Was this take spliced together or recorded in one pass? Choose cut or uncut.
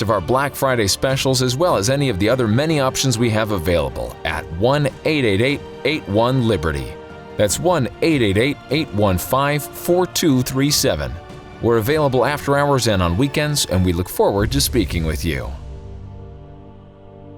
cut